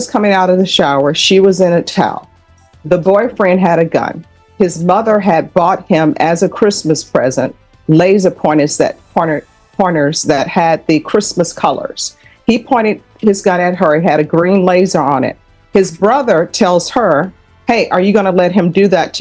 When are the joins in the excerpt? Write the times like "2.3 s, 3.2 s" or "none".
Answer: none